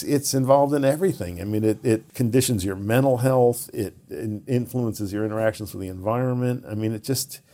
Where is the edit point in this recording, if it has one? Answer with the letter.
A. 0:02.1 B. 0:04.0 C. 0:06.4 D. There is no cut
A